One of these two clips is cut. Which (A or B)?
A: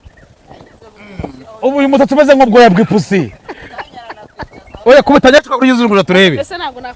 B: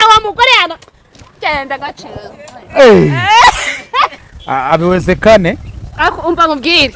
B